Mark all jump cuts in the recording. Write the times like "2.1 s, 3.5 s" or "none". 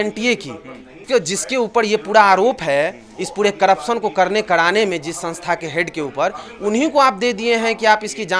0.9 s